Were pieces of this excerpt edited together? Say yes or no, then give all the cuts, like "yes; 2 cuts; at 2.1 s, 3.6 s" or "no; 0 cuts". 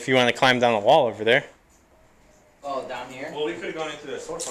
no; 0 cuts